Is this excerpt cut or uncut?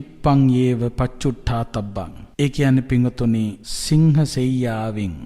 cut